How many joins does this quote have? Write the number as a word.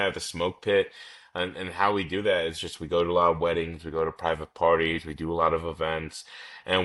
zero